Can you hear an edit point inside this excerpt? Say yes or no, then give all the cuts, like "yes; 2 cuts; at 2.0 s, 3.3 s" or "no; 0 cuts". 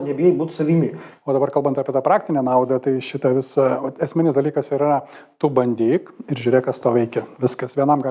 yes; 1 cut; at 1.1 s